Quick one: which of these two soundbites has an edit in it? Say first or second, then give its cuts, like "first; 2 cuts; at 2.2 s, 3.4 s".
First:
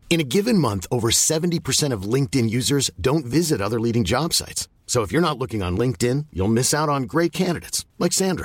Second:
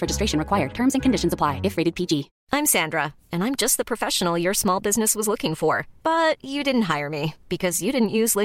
second; 1 cut; at 2.4 s